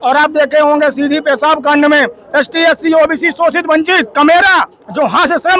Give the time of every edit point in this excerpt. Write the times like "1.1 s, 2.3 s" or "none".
2.2 s